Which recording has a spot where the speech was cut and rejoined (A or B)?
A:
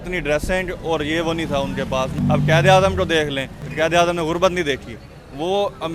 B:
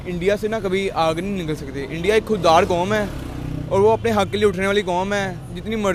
A